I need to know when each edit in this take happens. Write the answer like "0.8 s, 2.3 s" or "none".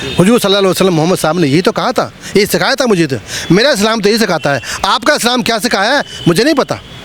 none